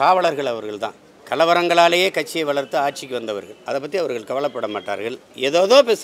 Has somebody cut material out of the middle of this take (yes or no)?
no